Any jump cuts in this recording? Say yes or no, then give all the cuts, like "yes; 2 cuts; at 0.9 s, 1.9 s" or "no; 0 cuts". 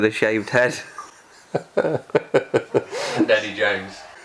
no; 0 cuts